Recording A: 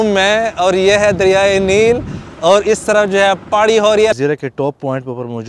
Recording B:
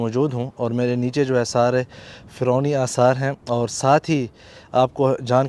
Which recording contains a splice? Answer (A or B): A